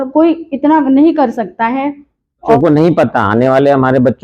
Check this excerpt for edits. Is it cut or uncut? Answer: cut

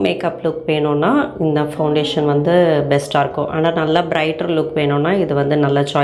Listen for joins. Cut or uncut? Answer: uncut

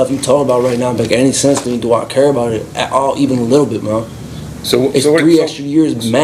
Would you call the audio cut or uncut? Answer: uncut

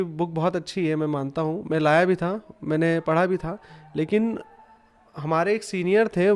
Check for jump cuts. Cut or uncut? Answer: uncut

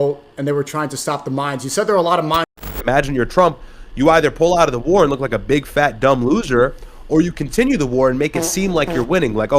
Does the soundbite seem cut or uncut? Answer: cut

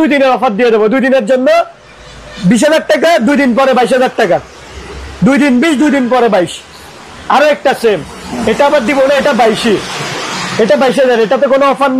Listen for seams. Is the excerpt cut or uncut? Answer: uncut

